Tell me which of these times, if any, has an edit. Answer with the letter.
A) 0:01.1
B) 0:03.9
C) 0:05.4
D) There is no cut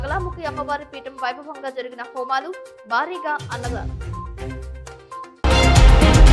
C